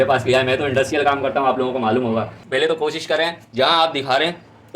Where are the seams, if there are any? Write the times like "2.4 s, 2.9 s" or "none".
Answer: 2.4 s